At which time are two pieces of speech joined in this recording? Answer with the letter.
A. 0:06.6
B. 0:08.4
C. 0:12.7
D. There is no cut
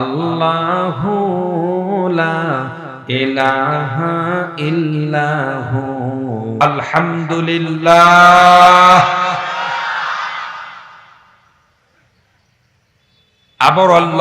A